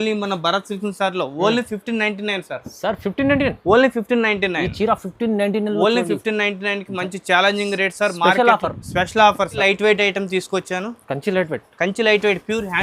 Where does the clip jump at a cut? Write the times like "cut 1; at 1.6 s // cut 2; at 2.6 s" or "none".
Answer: cut 1; at 9.6 s